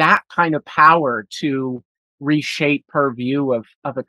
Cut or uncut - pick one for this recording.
cut